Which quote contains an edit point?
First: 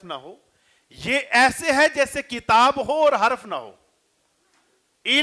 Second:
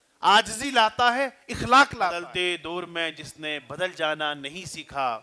second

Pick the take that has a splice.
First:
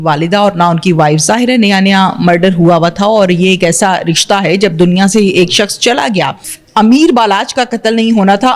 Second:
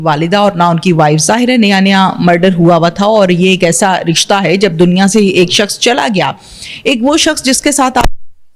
first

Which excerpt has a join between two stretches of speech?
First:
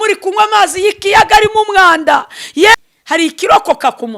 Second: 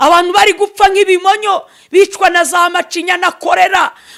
first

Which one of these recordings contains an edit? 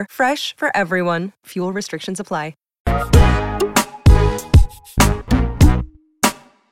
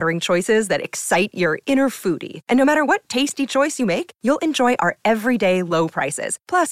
first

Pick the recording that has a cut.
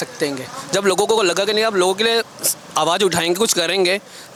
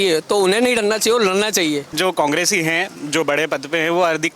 second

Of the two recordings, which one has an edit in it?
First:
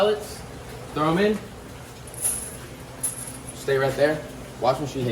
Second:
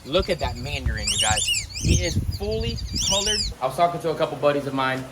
second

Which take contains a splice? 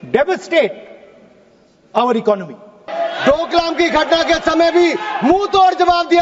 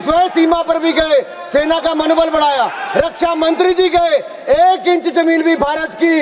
first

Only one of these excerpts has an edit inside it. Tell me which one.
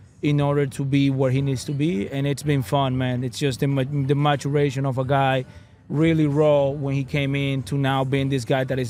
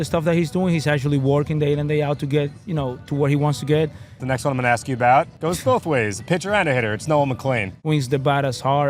second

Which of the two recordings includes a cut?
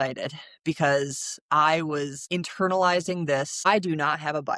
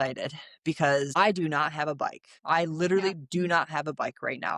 second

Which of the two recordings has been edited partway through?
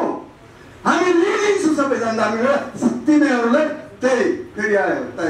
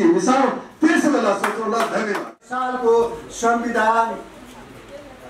second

